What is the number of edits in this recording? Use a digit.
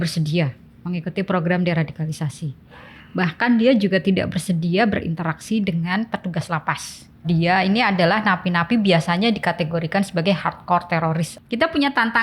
2